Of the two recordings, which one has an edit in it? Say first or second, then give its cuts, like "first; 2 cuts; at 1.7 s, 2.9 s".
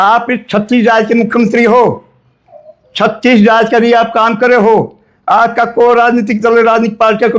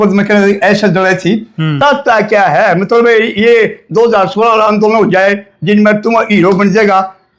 second; 1 cut; at 1.6 s